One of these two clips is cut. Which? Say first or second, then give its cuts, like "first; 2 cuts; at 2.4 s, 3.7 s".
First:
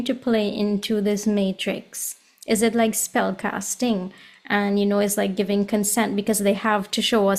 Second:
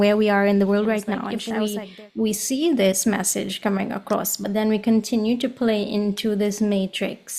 second; 1 cut; at 1.3 s